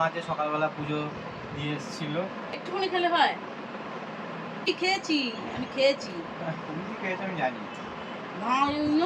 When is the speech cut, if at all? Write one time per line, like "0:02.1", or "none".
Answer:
0:02.6
0:04.7